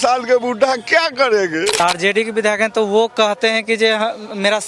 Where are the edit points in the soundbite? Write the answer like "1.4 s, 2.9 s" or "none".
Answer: 1.8 s